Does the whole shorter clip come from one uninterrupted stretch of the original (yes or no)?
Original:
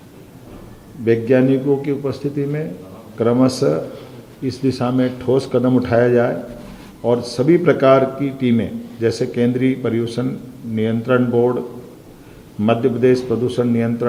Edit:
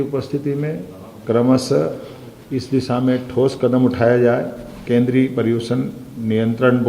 no